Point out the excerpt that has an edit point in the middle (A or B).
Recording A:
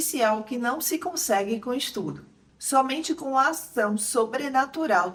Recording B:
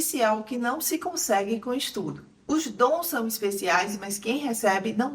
B